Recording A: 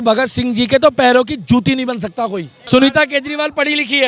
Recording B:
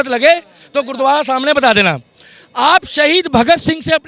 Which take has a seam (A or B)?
A